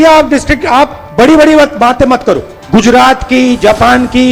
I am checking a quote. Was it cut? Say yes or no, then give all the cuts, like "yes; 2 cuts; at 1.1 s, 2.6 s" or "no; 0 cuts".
yes; 2 cuts; at 1.0 s, 2.5 s